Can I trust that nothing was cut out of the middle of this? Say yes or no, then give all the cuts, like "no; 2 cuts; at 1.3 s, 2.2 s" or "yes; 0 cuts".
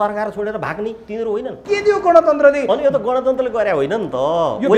no; 1 cut; at 1.6 s